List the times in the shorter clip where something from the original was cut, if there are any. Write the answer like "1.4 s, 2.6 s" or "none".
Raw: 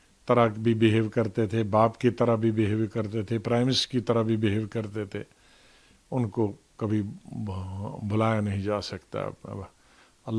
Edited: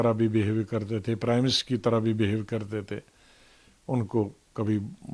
none